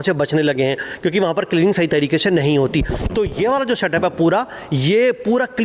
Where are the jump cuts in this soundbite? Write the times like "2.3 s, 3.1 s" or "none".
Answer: none

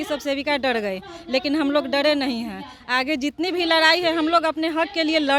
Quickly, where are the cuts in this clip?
none

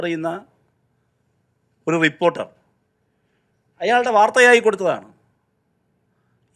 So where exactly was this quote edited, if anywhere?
none

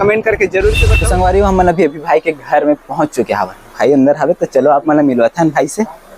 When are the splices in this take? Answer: 0.9 s

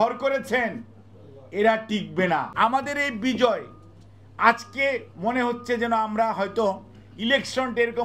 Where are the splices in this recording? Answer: 2.5 s

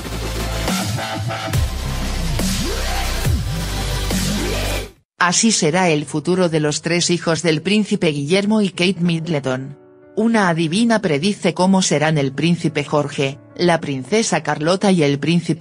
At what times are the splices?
none

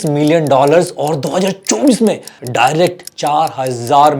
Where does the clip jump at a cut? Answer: 2.3 s

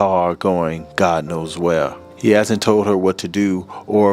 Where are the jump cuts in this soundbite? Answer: 2.0 s

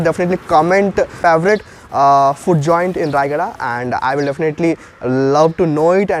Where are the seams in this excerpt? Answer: 1.1 s

